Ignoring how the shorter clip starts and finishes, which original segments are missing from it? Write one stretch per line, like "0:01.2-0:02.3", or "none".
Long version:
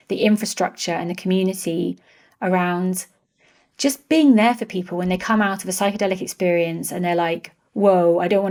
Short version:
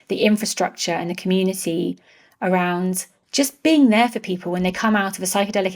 0:03.1-0:03.6